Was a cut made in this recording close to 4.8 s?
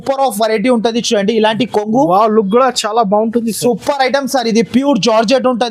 no; 0 cuts

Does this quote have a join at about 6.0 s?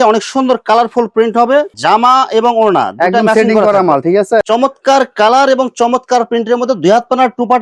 no; 2 cuts; at 1.7 s, 4.4 s

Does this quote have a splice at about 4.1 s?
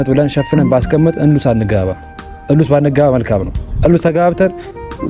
no; 0 cuts

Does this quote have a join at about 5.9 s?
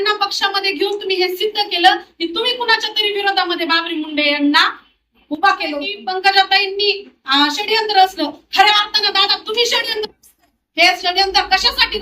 yes; 1 cut; at 5.9 s

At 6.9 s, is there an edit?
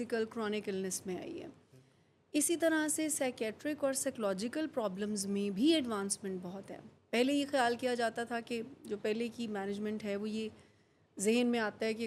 no; 0 cuts

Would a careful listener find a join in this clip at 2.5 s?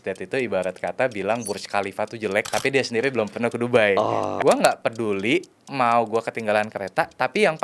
yes; 2 cuts; at 2.5 s, 4.3 s

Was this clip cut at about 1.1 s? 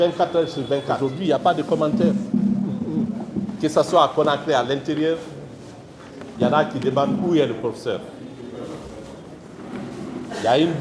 yes; 1 cut; at 1.1 s

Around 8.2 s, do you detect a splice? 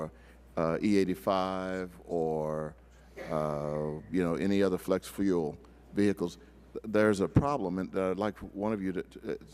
yes; 1 cut; at 8.2 s

